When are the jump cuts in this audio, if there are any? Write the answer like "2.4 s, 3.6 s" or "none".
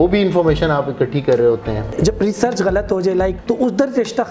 1.9 s, 3.4 s